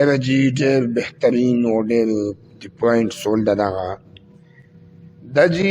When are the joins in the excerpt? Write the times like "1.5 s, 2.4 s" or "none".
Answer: none